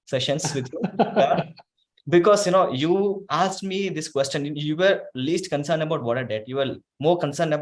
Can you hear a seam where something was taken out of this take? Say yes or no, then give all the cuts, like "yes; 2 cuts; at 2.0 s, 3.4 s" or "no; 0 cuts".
no; 0 cuts